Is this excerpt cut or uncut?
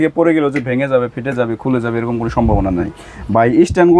uncut